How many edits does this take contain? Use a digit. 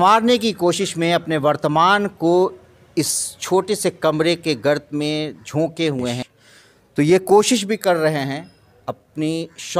1